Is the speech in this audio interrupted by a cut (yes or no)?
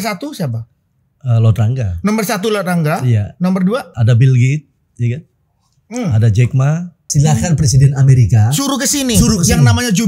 yes